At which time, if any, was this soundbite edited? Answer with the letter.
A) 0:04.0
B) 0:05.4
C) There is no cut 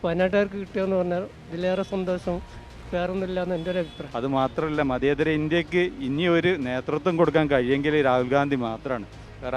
A